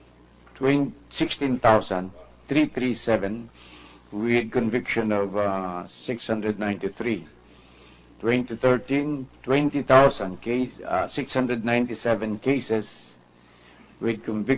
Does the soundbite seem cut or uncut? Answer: cut